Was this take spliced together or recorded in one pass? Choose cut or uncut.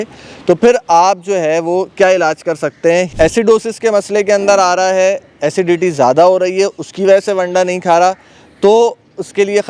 cut